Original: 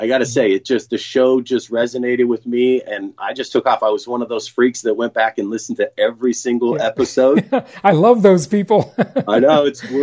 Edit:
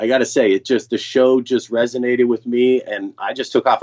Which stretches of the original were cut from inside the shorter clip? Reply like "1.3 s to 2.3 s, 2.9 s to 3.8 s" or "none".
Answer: none